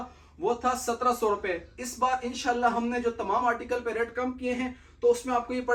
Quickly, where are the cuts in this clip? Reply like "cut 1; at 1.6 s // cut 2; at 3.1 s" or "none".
none